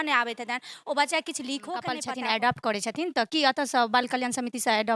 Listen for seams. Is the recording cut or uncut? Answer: cut